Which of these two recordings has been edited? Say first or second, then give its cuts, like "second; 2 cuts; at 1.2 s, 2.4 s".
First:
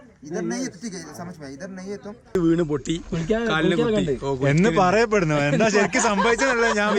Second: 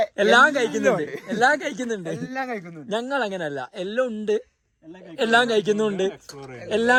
first; 1 cut; at 2.4 s